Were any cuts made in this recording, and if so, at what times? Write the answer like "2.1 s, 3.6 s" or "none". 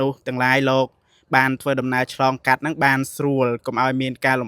none